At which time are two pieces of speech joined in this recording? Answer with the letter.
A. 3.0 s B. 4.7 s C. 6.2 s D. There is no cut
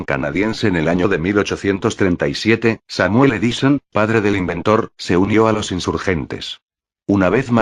D